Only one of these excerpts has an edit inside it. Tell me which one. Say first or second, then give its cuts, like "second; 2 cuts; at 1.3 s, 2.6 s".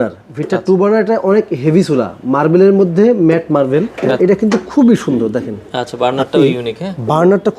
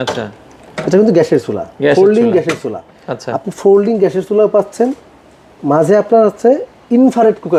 first; 1 cut; at 4.0 s